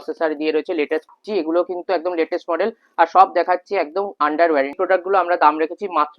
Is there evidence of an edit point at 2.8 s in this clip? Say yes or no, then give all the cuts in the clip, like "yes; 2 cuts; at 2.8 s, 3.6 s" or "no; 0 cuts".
no; 2 cuts; at 1.2 s, 4.7 s